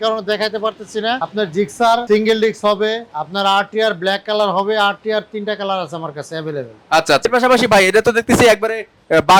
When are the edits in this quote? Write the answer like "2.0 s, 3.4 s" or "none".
1.2 s, 2.0 s, 3.1 s, 7.3 s